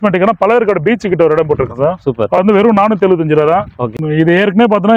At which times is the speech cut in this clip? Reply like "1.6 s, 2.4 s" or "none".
4.0 s